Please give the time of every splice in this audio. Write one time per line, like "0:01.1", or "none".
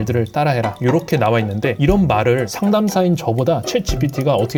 none